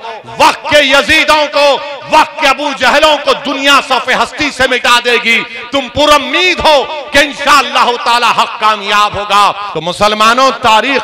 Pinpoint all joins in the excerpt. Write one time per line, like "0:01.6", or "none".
0:09.7